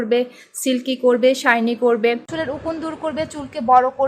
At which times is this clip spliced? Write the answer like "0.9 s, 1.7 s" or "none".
2.3 s